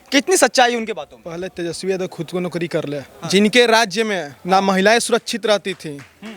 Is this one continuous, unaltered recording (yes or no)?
no